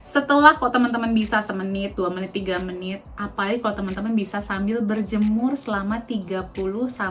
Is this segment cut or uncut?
uncut